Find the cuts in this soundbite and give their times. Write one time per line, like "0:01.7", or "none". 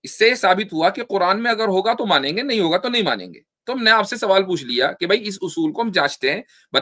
none